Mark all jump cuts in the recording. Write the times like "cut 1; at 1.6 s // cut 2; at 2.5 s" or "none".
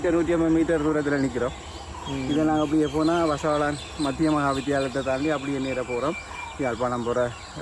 none